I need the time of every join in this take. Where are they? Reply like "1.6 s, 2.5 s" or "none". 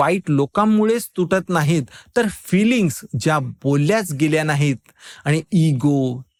none